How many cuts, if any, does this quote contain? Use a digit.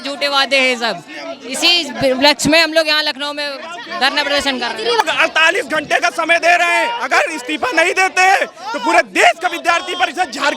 1